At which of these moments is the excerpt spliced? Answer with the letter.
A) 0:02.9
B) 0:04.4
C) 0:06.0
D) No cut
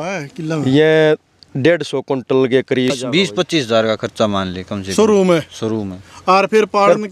A